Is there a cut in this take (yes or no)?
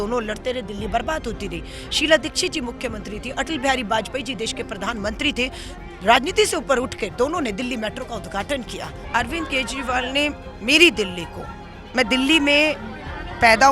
yes